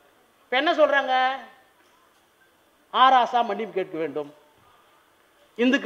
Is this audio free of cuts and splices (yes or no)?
yes